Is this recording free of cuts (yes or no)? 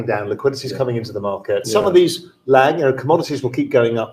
no